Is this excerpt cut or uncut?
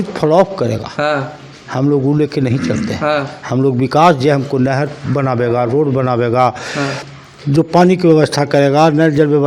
uncut